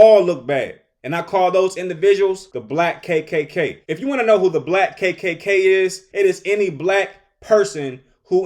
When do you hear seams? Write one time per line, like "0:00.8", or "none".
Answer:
0:02.5
0:03.8
0:06.0